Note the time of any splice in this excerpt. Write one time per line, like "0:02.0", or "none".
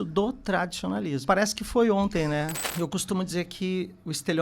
0:01.2
0:02.6